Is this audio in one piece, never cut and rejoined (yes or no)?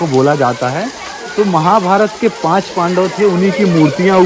yes